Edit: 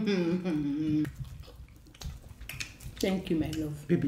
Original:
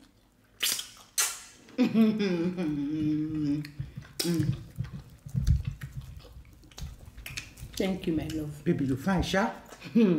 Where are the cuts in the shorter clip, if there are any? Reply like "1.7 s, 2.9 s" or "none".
1.1 s

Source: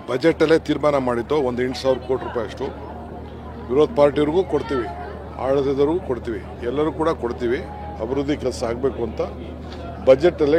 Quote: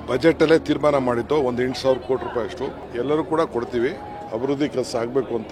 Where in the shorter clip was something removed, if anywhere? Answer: 2.8 s

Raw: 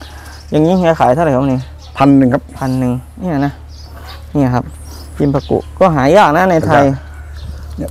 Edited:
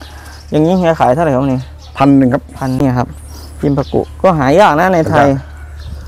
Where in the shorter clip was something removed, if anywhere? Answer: 2.8 s

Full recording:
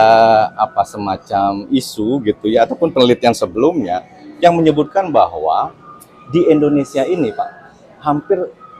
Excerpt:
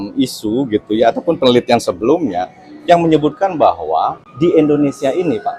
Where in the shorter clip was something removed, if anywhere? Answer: 4.2 s

